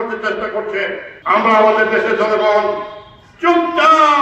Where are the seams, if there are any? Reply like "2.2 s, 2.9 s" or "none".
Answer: 1.1 s